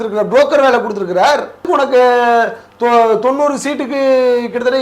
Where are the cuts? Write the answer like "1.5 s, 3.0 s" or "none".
1.7 s